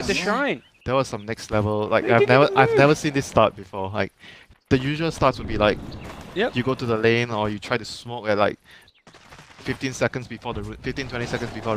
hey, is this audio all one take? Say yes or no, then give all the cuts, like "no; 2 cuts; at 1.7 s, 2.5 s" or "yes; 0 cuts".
no; 1 cut; at 8.6 s